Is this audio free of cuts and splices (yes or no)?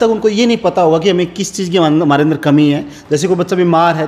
yes